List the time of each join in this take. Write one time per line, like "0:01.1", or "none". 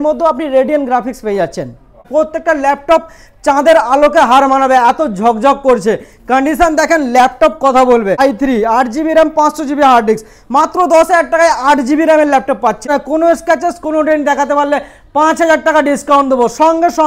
0:02.1
0:08.2
0:12.9